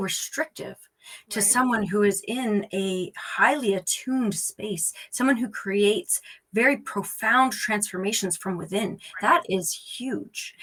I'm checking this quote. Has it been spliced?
no; 0 cuts

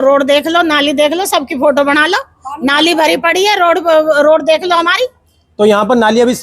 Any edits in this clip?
no; 0 cuts

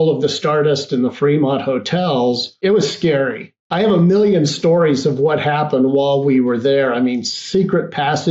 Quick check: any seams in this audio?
yes; 2 cuts; at 2.6 s, 3.6 s

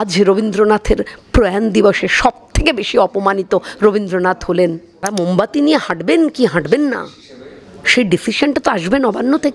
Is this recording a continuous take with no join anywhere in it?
no; 1 cut; at 5.1 s

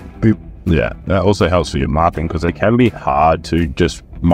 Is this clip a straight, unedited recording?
no; 2 cuts; at 1.0 s, 2.5 s

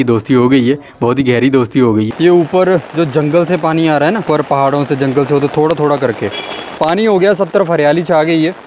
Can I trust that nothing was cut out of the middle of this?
no; 3 cuts; at 2.1 s, 4.2 s, 6.8 s

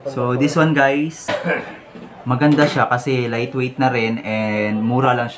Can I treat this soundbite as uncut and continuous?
no; 1 cut; at 1.3 s

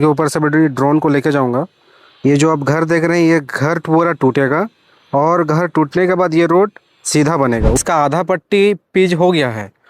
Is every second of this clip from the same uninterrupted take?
no; 1 cut; at 7.8 s

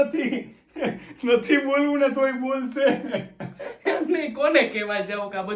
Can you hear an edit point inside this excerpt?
no; 0 cuts

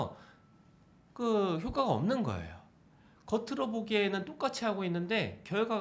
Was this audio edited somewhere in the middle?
no; 0 cuts

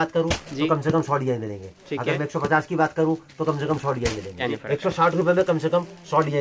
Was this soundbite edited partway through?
yes; 1 cut; at 4.5 s

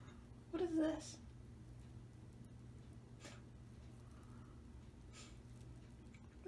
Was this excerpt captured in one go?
yes; 0 cuts

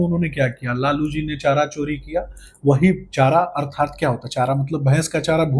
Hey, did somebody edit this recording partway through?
no; 0 cuts

